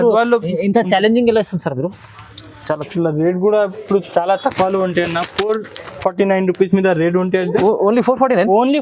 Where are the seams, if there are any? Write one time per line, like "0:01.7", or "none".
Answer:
0:02.8